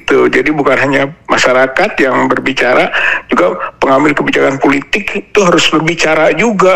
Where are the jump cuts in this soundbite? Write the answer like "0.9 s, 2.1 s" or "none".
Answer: none